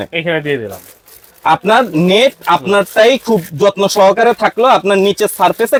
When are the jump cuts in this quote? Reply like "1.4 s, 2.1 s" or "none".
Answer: none